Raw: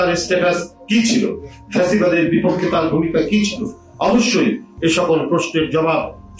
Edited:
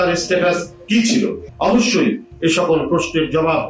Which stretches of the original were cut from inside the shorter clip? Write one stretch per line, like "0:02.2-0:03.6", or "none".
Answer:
0:01.4-0:03.8

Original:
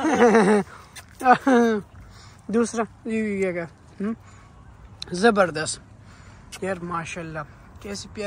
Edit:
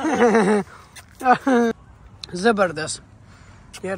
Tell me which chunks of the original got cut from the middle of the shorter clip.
0:01.7-0:04.5

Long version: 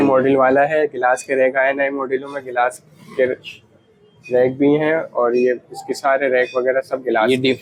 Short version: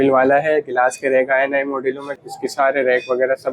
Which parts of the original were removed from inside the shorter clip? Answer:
0:02.5-0:05.7

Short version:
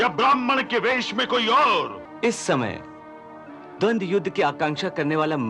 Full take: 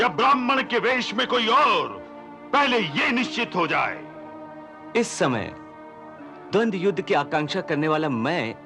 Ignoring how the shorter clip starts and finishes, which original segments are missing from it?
0:02.0-0:04.7

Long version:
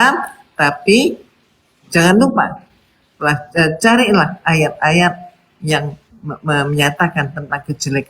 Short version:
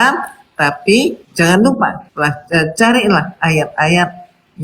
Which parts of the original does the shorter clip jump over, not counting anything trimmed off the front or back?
0:01.2-0:01.8
0:02.6-0:03.1

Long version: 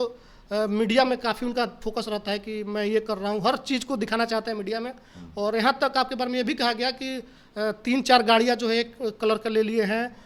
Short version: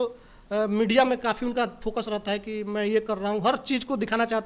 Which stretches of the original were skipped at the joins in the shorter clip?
none

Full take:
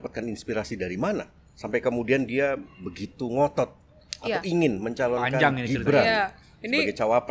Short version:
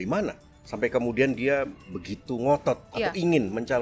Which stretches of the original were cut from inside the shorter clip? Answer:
0:03.8-0:04.2

